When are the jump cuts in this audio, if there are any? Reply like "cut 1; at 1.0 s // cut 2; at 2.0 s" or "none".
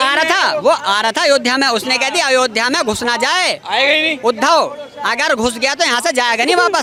none